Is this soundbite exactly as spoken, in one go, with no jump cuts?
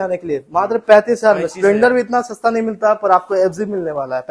yes; 0 cuts

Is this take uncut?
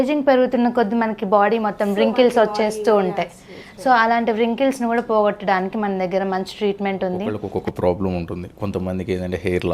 no; 1 cut; at 7.4 s

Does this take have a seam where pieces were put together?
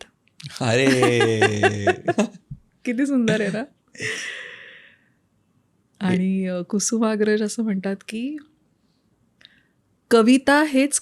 no; 0 cuts

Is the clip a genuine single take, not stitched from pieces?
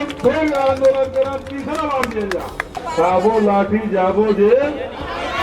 no; 1 cut; at 2.8 s

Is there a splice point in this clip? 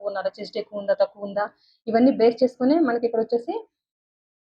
no; 0 cuts

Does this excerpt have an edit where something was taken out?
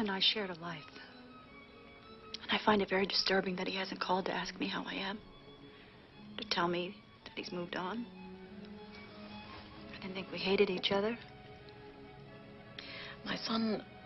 no; 0 cuts

